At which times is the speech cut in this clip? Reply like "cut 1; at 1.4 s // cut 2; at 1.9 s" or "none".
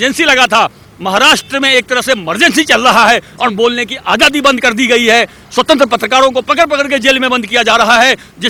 none

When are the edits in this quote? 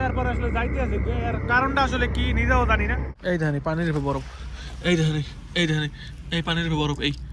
cut 1; at 3.1 s

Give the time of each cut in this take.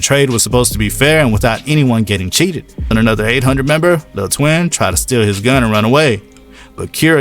cut 1; at 2.8 s

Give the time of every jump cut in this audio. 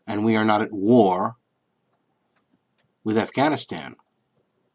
cut 1; at 1.4 s

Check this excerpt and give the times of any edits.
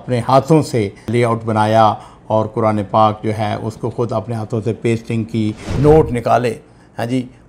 cut 1; at 5.7 s

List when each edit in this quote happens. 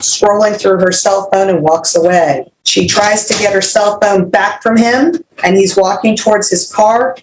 cut 1; at 2.5 s // cut 2; at 5.3 s

